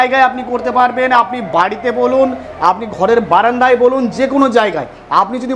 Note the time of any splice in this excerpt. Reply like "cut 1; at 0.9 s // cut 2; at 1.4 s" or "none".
none